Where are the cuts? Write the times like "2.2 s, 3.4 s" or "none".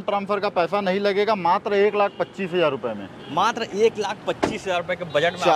none